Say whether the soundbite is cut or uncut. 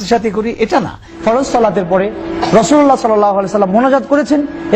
cut